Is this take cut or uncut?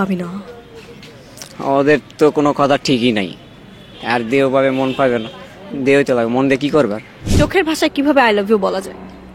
cut